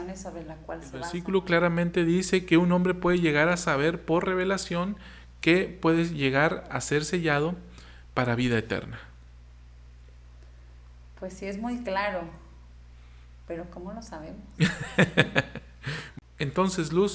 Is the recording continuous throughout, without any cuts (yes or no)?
no